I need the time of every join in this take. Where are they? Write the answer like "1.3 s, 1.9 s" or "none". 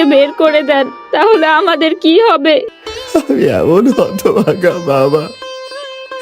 2.7 s